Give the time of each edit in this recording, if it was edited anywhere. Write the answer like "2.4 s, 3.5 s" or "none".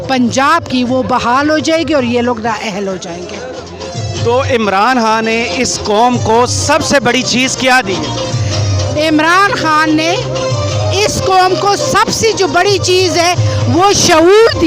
none